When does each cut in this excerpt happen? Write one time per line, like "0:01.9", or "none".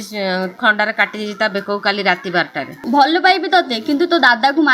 0:02.8